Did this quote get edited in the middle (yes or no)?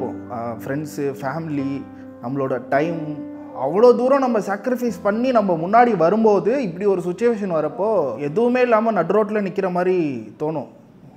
yes